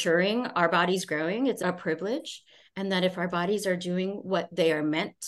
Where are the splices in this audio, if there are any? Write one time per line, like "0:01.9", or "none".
0:01.6